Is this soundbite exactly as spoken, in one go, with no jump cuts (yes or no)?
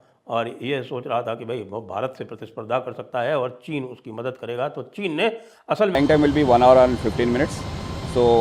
no